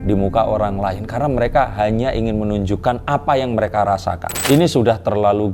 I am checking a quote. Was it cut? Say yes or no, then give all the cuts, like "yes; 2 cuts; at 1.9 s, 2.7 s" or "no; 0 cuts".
yes; 1 cut; at 4.3 s